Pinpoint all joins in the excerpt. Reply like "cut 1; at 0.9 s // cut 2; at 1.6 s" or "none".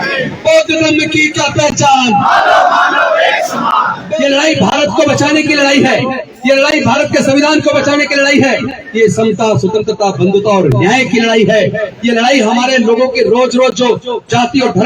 cut 1; at 4.0 s